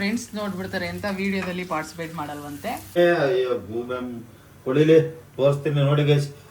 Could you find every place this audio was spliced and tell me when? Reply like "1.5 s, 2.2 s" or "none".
3.0 s